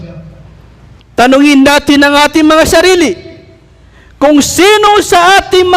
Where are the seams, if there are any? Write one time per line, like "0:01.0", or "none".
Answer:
0:01.1

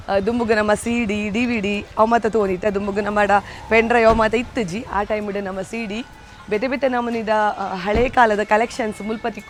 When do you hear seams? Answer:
none

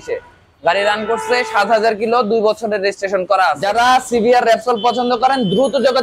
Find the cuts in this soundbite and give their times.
0:03.6

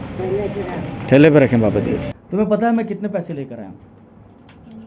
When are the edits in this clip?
0:02.1

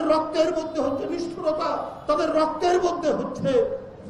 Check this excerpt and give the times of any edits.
none

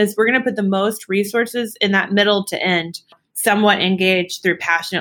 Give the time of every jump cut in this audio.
0:03.2

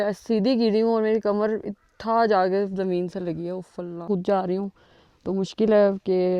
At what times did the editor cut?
none

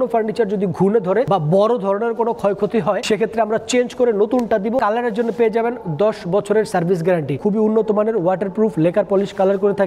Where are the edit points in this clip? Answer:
0:01.3
0:03.0
0:04.8
0:07.3

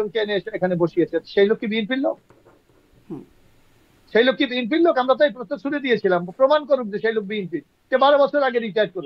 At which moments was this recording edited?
none

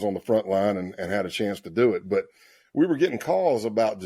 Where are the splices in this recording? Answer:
none

